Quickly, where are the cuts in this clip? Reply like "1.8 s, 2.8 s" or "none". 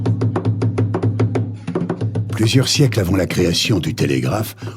1.4 s